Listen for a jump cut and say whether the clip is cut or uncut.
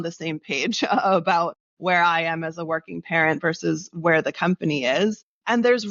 uncut